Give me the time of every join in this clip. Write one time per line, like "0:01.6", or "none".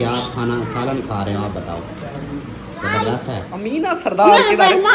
0:03.6